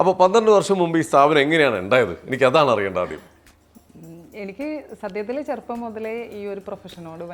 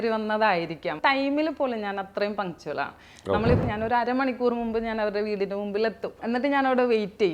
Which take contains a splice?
second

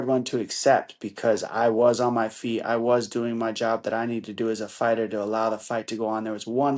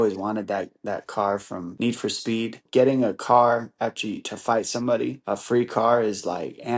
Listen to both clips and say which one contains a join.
second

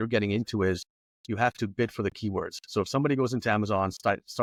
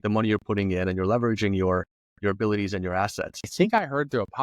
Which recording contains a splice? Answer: second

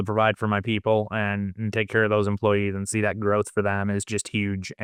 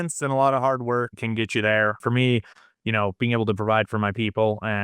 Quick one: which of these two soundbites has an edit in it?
second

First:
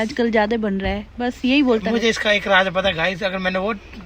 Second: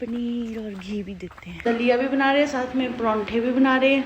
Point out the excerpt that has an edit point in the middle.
second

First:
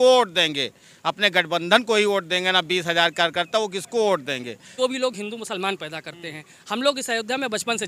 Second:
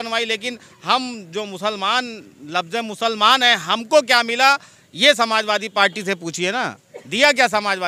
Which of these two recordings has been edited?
first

